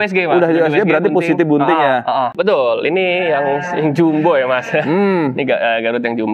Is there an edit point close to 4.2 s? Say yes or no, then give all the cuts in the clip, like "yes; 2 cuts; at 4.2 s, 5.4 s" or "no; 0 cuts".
no; 1 cut; at 2.3 s